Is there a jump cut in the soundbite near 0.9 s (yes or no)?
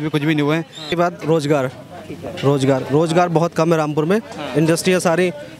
yes